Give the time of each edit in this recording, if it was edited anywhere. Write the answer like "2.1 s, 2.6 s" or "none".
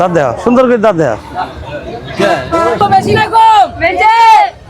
2.8 s